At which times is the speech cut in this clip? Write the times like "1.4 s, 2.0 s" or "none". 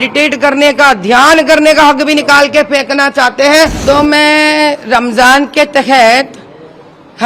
3.8 s

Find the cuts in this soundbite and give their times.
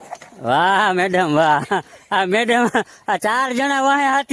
none

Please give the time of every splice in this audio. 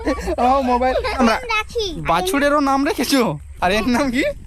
1.2 s

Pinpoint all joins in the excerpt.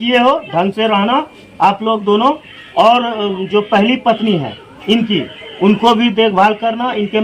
none

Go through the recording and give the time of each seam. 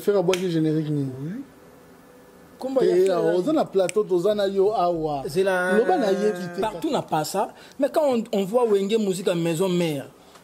6.5 s

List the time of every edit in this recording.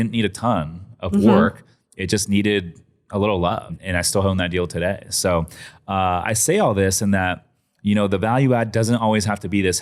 3.8 s

